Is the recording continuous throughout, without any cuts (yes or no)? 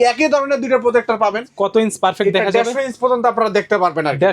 no